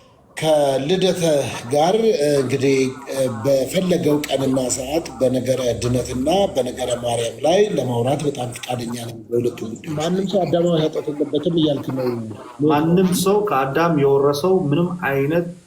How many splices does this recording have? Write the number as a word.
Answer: one